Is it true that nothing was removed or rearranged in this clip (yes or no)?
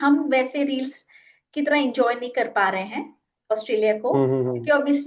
yes